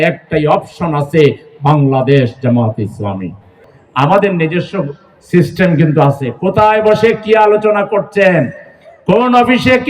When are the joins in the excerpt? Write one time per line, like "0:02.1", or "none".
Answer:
0:03.7